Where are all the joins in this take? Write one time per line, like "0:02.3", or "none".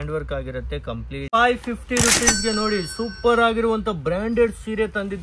0:01.3